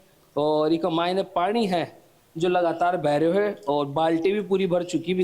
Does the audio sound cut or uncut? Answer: uncut